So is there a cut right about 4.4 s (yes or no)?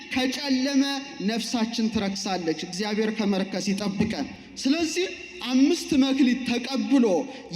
yes